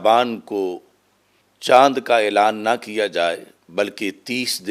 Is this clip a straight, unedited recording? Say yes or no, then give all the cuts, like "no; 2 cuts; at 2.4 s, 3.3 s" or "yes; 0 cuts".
yes; 0 cuts